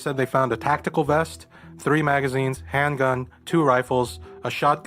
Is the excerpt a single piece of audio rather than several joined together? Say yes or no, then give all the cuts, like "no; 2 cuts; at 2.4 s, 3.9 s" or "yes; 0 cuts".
yes; 0 cuts